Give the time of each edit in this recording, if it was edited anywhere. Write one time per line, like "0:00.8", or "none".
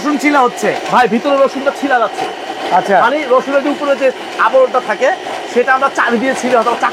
none